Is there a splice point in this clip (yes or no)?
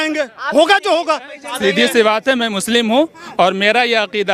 yes